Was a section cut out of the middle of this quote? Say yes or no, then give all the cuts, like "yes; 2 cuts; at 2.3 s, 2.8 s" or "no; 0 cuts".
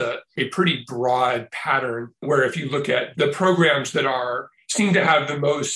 yes; 1 cut; at 3.1 s